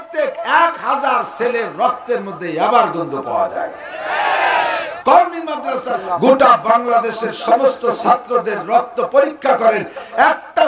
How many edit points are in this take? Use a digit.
2